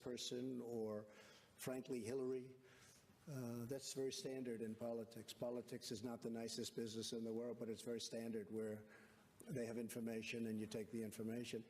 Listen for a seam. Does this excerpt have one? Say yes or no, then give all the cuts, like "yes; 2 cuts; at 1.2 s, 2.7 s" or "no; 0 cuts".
yes; 1 cut; at 10.8 s